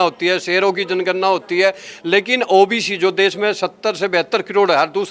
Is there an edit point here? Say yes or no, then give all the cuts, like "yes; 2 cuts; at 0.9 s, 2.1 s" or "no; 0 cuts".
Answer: no; 0 cuts